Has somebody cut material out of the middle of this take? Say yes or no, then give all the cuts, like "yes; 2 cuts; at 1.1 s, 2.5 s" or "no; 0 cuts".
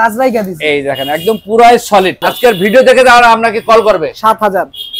yes; 1 cut; at 2.3 s